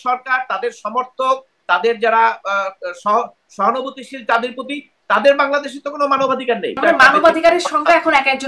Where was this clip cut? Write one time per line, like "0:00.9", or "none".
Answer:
0:06.8